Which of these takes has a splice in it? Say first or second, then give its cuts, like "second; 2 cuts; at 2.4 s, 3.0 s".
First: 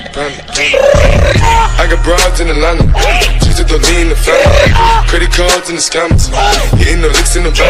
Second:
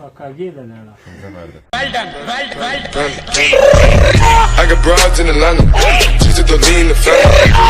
second; 1 cut; at 1.5 s